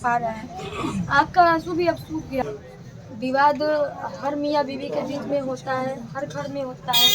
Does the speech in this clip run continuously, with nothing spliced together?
no; 1 cut; at 2.4 s

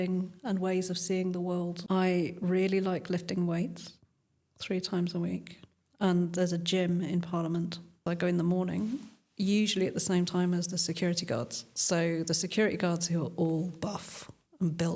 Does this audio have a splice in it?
yes; 2 cuts; at 1.8 s, 8.0 s

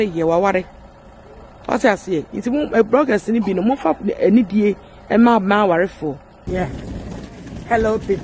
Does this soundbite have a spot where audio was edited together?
yes; 1 cut; at 6.3 s

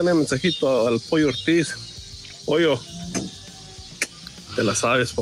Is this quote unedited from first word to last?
yes; 0 cuts

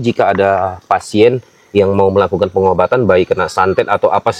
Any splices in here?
no; 0 cuts

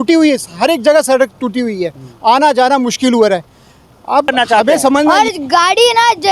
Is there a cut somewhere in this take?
yes; 1 cut; at 5.1 s

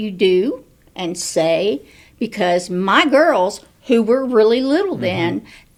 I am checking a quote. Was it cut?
no; 0 cuts

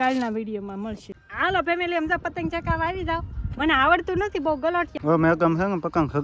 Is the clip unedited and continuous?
no; 2 cuts; at 1.1 s, 4.9 s

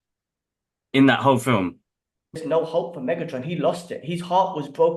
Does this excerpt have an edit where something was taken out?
yes; 1 cut; at 2.3 s

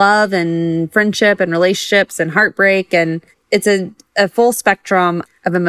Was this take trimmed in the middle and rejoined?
no; 0 cuts

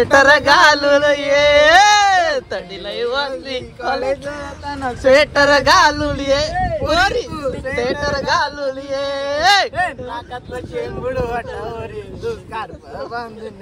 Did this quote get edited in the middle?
no; 0 cuts

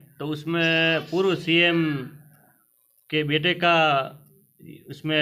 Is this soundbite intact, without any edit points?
yes; 0 cuts

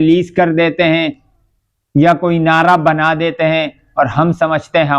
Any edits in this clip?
no; 0 cuts

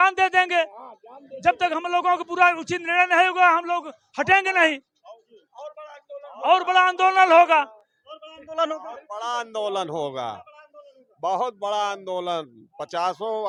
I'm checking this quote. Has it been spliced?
no; 0 cuts

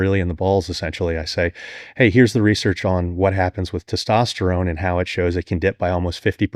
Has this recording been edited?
no; 0 cuts

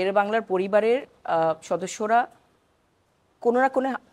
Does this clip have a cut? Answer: no; 0 cuts

